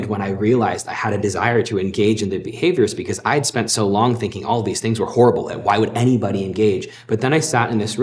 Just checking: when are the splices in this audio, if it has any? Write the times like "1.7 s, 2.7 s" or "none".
6.9 s